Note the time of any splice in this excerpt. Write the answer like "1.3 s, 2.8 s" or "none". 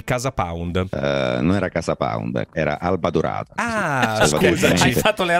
0.9 s, 2.5 s